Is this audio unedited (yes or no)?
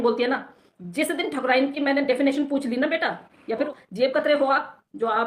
no